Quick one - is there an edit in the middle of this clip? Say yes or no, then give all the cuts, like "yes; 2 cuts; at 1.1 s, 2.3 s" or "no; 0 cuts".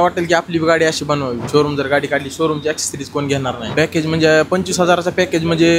yes; 2 cuts; at 1.4 s, 3.6 s